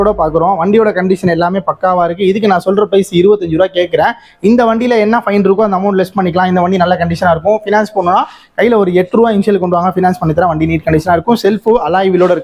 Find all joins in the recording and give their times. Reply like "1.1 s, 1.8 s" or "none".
none